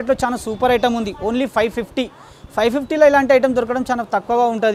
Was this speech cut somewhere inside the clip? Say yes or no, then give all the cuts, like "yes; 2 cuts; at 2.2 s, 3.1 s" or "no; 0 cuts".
no; 0 cuts